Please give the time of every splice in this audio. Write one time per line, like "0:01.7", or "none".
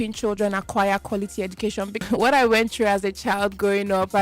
0:02.0